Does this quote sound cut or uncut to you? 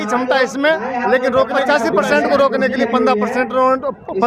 cut